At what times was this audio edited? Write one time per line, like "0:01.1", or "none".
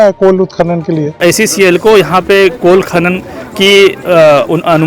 0:01.2